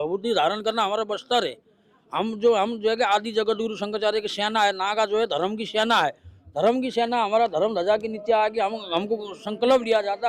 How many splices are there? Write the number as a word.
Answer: zero